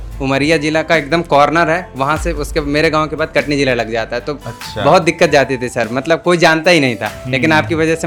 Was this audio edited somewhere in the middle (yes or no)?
no